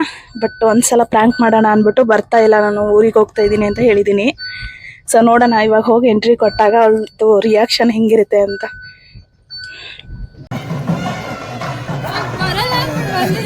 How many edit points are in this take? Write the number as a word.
one